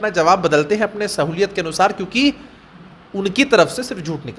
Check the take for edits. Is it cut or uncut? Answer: uncut